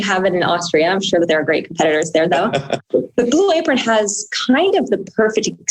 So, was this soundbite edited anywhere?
yes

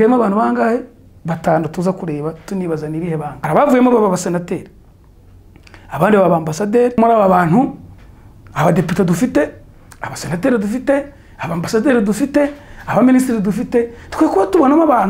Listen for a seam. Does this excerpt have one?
yes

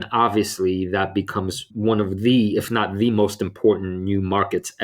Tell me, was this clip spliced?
yes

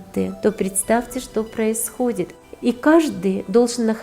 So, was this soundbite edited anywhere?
yes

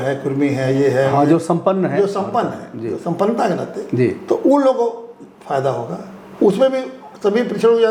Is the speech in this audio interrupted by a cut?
no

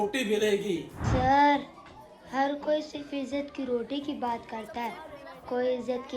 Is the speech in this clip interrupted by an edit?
yes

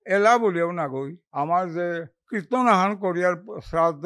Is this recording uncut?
no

